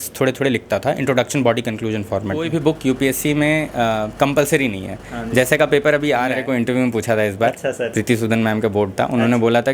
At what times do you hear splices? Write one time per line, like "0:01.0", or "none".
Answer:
0:02.5
0:06.4

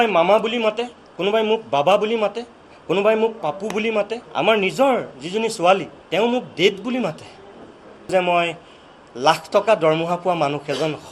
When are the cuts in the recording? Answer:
0:04.2
0:06.0
0:08.1

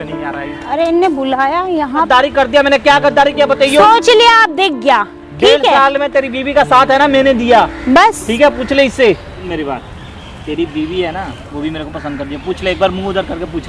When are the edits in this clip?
0:02.1
0:09.5

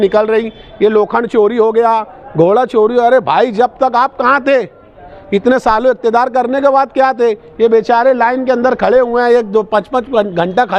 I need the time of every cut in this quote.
none

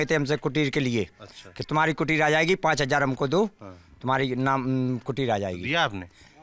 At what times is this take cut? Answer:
none

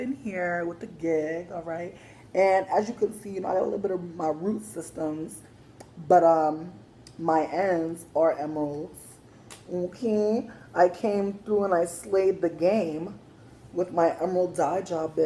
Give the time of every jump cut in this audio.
0:02.3

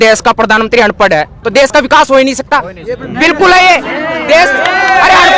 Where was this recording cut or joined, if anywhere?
0:01.4

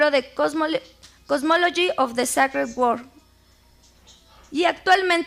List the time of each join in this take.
none

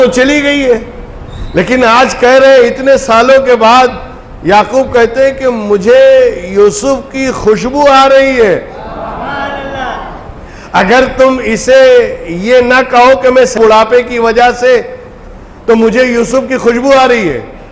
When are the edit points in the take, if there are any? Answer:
0:13.6

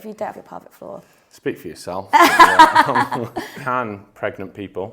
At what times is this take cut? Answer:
0:03.5

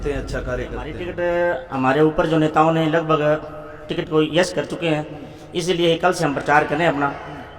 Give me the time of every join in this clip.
0:01.1

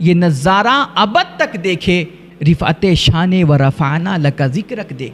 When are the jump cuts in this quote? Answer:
none

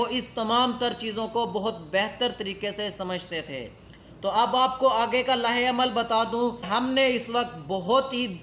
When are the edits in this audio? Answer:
0:06.6

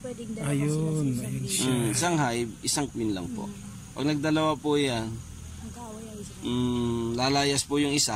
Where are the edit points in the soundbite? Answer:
none

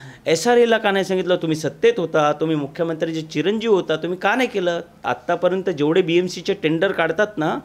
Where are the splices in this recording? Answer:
0:05.1

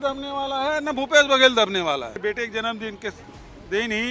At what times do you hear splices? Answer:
0:02.1

